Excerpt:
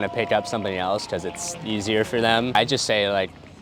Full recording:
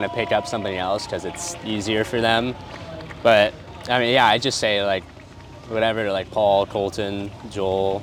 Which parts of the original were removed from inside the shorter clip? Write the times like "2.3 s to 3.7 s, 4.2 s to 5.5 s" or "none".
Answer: 2.6 s to 4.3 s